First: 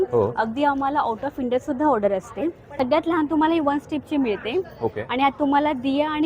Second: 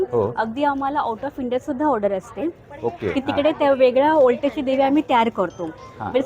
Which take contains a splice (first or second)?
first